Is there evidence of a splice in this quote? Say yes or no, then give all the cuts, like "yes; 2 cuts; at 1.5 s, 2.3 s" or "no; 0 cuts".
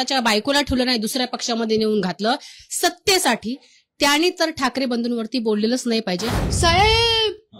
yes; 1 cut; at 6.3 s